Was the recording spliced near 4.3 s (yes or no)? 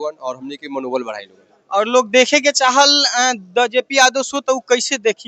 no